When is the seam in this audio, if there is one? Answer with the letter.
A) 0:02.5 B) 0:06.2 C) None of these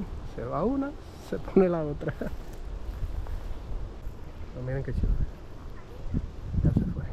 C